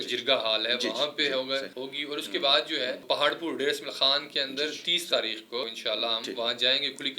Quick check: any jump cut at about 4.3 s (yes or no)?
no